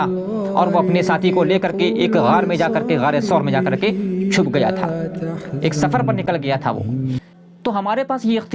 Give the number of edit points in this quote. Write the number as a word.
one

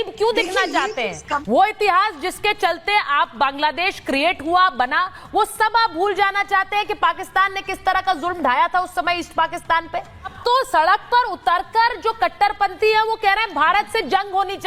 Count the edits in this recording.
two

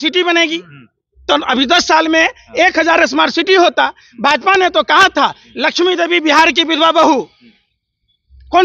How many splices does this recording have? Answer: zero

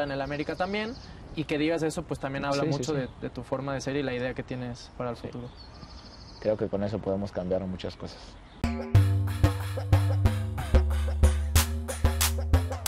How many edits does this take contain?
one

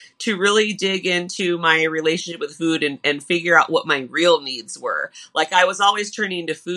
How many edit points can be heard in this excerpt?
zero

